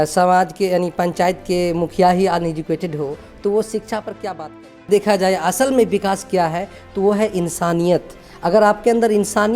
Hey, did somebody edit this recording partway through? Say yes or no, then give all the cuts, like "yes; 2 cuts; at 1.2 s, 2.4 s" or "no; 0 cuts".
yes; 1 cut; at 4.9 s